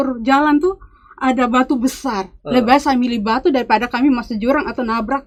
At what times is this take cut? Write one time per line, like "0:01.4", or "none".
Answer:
none